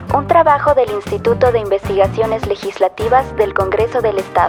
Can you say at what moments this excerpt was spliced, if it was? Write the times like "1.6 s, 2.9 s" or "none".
none